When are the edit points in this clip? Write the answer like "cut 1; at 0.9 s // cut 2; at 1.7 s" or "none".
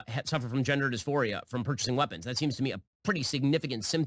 none

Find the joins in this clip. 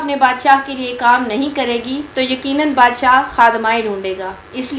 none

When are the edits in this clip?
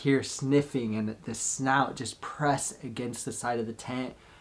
none

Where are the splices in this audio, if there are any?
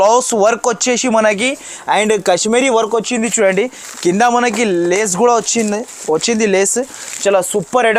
none

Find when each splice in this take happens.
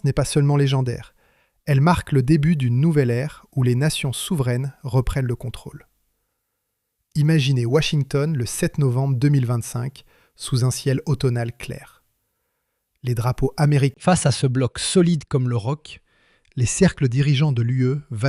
cut 1; at 14.0 s

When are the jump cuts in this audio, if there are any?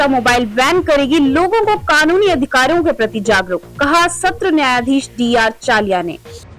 none

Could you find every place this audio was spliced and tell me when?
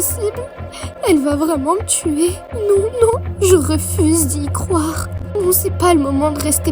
none

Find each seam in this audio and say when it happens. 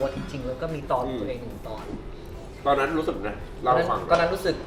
none

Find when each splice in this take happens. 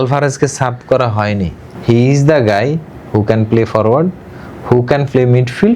cut 1; at 1.7 s

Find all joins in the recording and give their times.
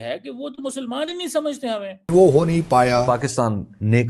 none

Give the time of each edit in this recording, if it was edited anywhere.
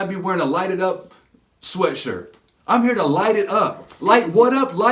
none

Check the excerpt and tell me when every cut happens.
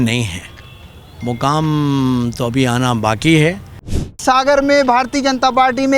cut 1; at 4.2 s

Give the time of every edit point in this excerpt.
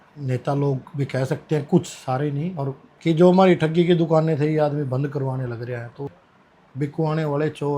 cut 1; at 2.8 s // cut 2; at 6.2 s

